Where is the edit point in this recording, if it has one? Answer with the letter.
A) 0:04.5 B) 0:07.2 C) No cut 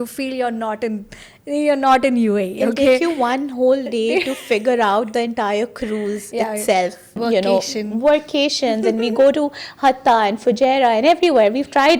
B